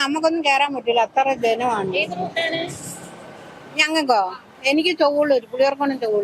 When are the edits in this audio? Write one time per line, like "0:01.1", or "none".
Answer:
none